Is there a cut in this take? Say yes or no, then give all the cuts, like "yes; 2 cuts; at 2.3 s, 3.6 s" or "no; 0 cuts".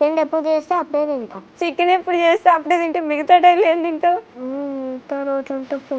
yes; 2 cuts; at 1.4 s, 4.3 s